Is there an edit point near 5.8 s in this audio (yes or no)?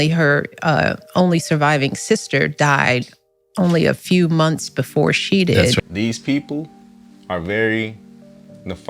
yes